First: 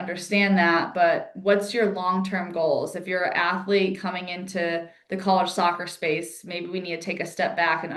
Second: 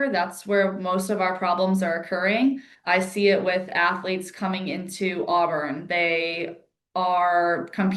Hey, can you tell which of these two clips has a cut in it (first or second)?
second